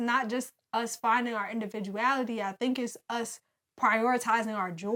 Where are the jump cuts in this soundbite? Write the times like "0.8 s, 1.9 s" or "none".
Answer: none